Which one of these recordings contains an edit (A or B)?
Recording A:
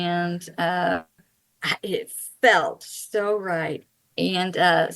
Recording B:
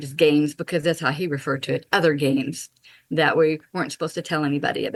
A